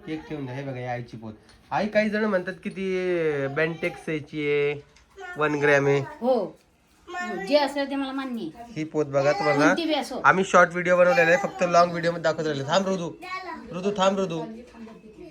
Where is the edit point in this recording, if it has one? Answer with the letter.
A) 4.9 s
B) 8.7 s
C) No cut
C